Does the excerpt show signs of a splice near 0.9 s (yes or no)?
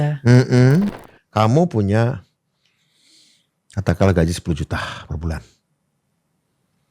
yes